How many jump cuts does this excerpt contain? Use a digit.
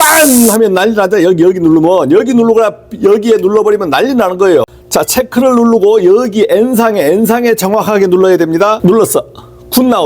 1